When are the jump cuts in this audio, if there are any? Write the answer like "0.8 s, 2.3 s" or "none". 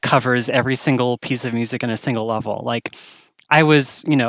none